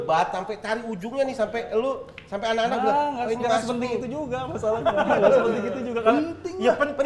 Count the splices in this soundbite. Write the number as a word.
zero